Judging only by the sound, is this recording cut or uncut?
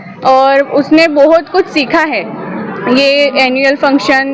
uncut